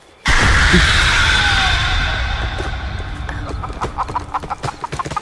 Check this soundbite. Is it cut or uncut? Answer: uncut